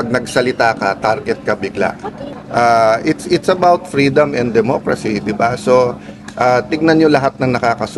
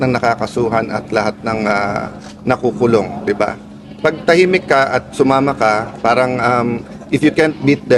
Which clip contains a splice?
first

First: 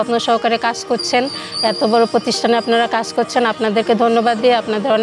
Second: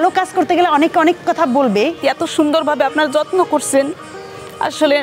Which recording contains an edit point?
second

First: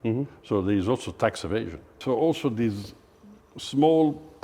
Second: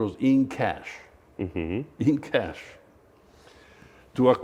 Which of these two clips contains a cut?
first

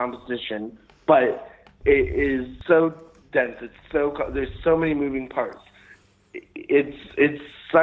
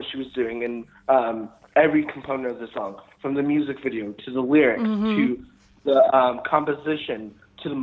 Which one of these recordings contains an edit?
first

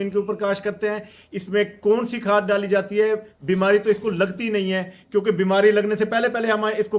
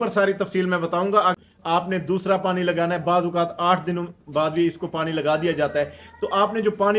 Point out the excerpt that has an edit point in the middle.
second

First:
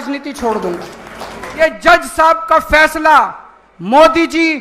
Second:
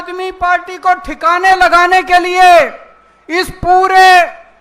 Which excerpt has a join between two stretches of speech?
first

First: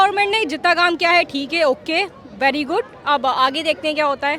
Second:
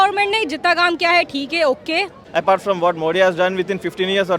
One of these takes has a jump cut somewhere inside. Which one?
second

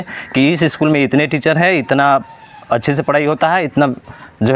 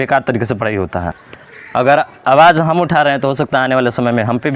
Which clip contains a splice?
second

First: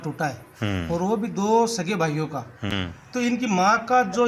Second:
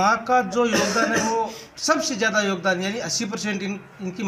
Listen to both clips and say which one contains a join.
first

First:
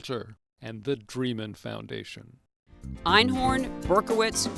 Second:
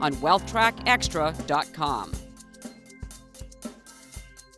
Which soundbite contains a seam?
first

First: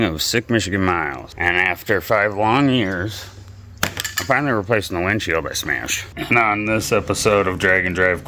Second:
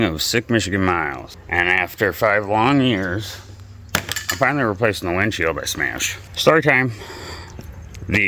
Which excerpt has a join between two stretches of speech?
first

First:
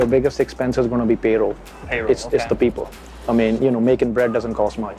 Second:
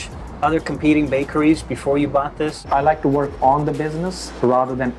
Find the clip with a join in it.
second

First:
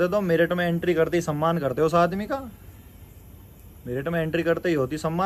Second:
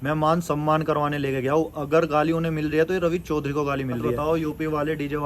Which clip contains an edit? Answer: second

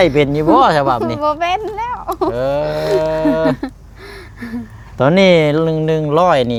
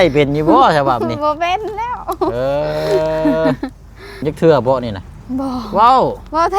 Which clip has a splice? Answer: second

